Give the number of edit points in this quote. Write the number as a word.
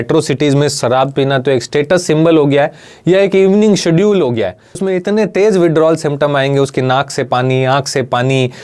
one